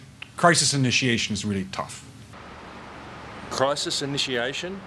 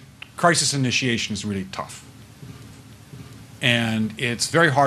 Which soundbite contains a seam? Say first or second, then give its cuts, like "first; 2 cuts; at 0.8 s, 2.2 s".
second; 1 cut; at 2.3 s